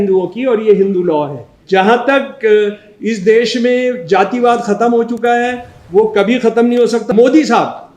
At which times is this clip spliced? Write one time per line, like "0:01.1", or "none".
0:01.5
0:07.1